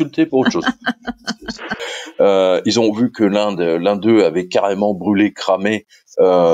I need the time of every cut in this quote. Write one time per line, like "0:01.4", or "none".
0:01.8